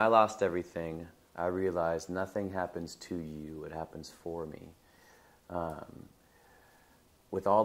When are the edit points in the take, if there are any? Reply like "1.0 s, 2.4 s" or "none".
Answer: none